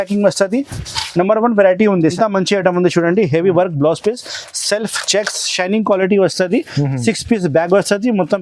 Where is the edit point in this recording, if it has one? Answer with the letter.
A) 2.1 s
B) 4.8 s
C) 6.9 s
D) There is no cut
A